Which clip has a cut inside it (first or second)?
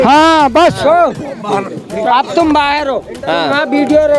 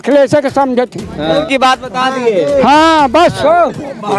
second